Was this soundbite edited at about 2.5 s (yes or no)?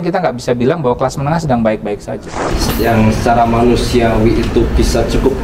yes